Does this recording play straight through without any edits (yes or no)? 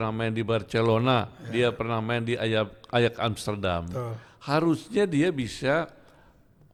yes